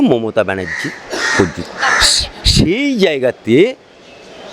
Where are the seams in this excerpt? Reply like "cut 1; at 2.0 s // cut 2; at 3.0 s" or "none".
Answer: none